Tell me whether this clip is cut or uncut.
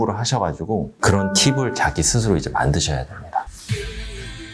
cut